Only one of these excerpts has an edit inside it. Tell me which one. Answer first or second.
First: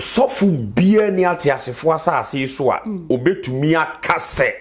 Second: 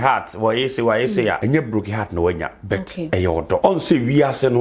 second